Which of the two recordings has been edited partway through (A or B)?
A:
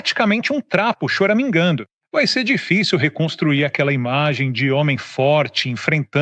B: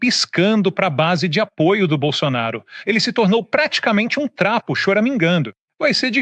B